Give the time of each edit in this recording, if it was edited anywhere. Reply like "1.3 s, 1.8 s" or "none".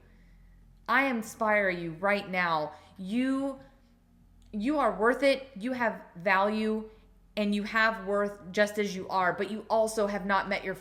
none